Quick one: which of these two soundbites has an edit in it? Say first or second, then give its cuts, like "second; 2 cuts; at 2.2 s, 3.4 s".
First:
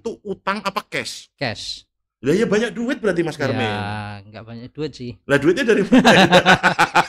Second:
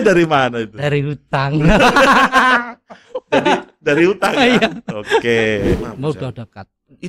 second; 1 cut; at 5.8 s